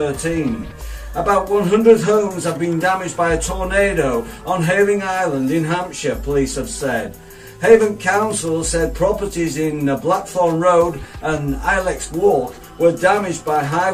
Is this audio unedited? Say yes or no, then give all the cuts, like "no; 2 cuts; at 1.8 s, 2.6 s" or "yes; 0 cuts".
yes; 0 cuts